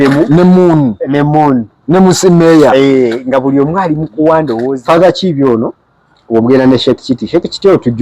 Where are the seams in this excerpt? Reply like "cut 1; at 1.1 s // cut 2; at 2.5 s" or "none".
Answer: cut 1; at 4.7 s